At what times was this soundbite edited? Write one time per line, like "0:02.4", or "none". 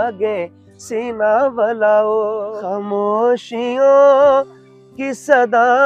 0:02.5